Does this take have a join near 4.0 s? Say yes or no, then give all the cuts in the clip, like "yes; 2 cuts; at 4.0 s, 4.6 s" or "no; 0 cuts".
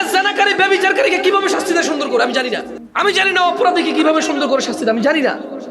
no; 1 cut; at 2.8 s